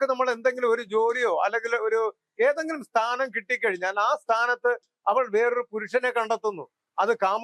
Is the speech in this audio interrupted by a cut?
no; 0 cuts

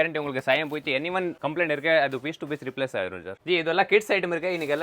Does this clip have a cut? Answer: yes; 2 cuts; at 1.4 s, 3.4 s

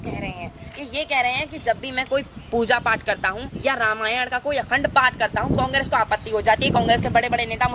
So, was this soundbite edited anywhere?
yes; 1 cut; at 3.5 s

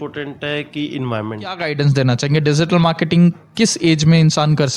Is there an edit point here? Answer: yes; 1 cut; at 1.6 s

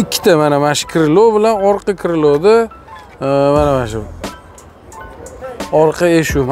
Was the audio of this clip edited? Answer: yes; 1 cut; at 5.5 s

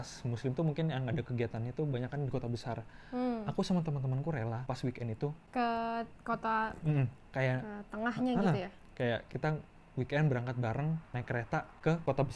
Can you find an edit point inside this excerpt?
no; 0 cuts

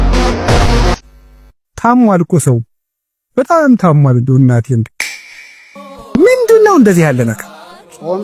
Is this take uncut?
yes; 0 cuts

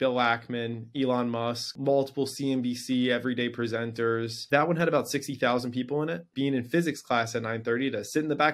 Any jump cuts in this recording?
yes; 3 cuts; at 1.7 s, 4.3 s, 6.3 s

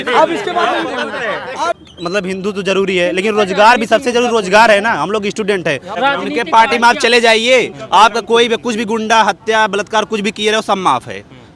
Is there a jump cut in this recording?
yes; 2 cuts; at 1.8 s, 5.9 s

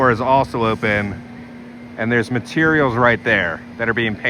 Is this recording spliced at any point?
no; 0 cuts

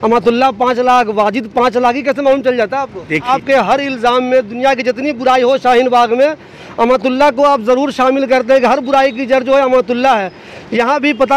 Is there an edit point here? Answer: yes; 1 cut; at 3.3 s

